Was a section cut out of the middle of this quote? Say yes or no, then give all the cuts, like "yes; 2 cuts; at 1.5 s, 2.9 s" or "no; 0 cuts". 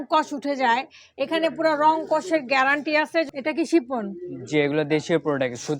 yes; 1 cut; at 3.3 s